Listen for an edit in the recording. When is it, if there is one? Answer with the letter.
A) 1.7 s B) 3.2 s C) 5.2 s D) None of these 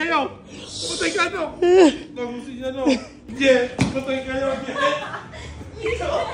B